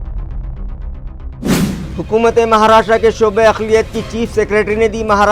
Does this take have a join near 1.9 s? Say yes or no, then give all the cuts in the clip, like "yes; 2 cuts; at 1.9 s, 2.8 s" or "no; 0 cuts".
yes; 1 cut; at 1.9 s